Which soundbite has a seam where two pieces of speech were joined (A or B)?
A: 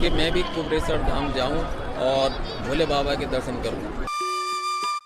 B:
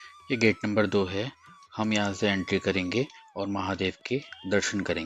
A